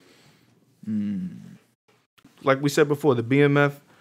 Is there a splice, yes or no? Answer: yes